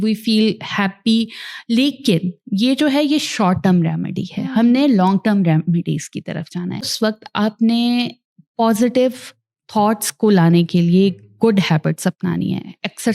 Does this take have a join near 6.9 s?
yes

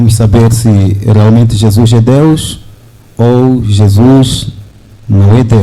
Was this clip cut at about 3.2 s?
no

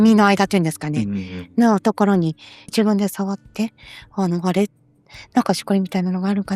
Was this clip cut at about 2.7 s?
yes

